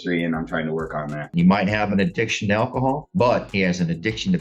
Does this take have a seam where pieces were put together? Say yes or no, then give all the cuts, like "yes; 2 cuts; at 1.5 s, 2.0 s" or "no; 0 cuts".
yes; 1 cut; at 1.3 s